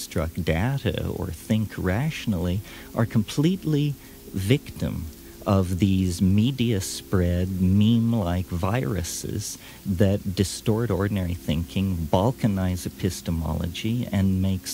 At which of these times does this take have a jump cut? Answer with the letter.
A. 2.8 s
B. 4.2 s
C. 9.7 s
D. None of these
D